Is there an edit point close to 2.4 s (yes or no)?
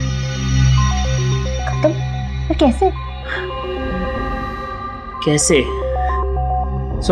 no